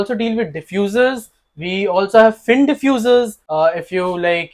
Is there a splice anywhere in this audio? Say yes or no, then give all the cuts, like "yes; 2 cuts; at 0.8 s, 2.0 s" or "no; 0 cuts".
yes; 1 cut; at 3.4 s